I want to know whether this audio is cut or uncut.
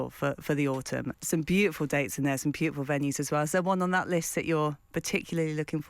cut